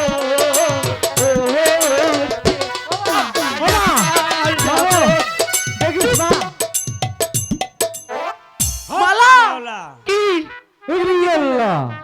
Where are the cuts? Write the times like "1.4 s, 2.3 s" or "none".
none